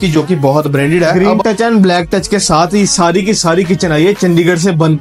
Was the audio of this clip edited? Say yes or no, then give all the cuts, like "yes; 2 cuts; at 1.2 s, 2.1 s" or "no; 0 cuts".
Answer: yes; 1 cut; at 1.1 s